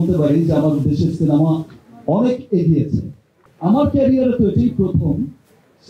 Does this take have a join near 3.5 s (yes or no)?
yes